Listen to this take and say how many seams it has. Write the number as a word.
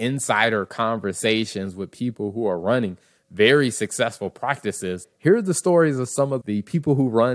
two